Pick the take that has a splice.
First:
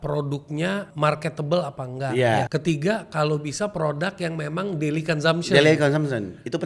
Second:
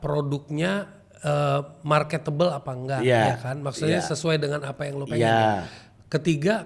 first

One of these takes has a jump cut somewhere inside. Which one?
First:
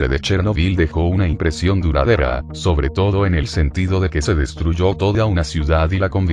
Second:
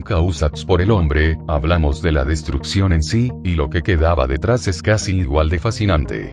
first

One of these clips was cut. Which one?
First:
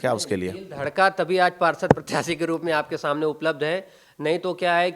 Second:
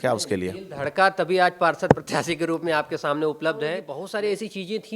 second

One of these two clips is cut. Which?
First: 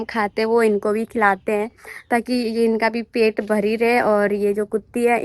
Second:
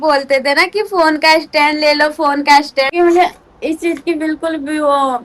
second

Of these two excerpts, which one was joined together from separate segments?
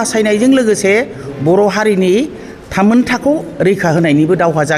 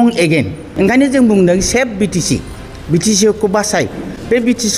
second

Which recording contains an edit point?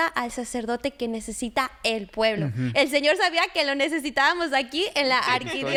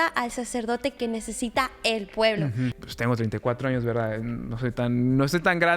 second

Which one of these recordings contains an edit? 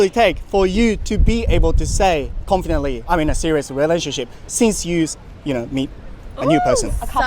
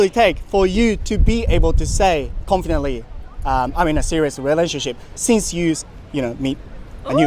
first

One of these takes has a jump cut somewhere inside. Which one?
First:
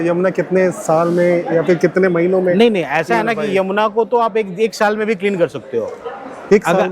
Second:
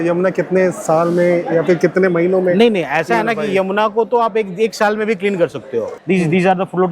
second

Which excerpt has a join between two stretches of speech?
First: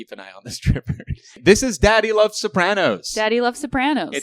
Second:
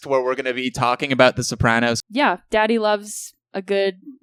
first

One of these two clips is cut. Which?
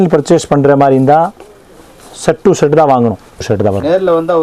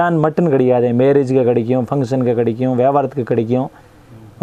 first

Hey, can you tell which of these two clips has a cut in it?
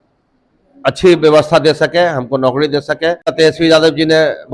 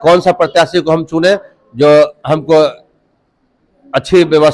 first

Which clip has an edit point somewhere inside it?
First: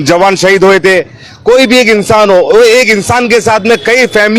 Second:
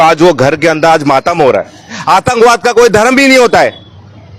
second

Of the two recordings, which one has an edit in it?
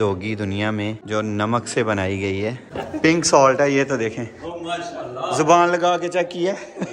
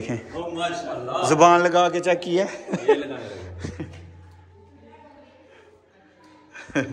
first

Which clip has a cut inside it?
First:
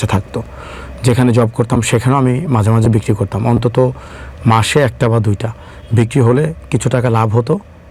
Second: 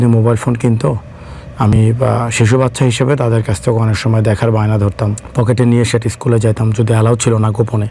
second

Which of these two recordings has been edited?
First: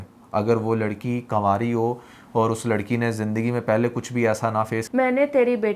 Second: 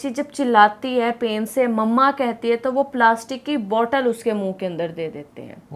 first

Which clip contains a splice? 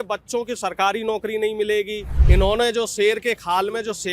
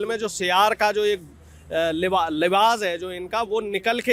first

